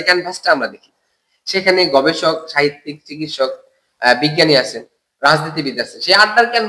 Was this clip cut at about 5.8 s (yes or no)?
no